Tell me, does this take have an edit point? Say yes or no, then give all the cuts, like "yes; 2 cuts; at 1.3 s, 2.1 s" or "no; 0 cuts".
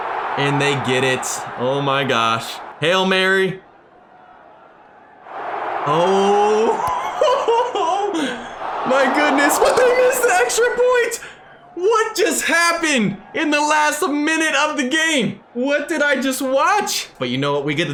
no; 0 cuts